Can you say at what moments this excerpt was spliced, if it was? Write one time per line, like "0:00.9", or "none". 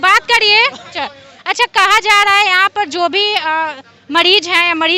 0:01.0